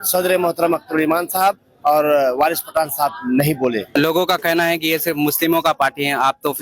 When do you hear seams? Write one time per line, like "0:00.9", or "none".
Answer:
0:03.9